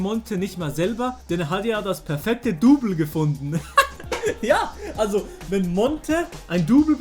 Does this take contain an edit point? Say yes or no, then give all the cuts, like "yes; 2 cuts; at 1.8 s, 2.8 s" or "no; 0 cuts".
yes; 2 cuts; at 1.2 s, 3.6 s